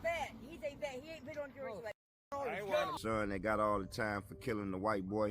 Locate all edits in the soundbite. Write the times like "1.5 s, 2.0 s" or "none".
2.9 s